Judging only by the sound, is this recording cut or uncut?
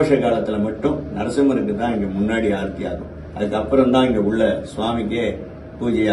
uncut